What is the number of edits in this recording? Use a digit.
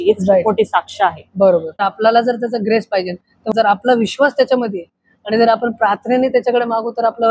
2